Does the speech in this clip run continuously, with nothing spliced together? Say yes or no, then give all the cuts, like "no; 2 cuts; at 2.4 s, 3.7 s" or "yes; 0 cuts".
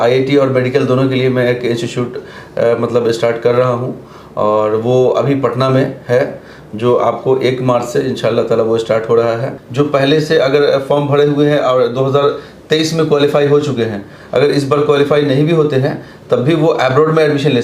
no; 1 cut; at 9.6 s